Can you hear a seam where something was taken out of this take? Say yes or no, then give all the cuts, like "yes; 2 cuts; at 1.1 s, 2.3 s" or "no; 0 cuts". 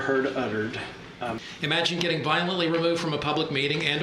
yes; 1 cut; at 1.5 s